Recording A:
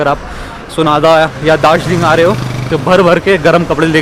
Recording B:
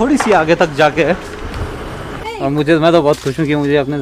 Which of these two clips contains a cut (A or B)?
B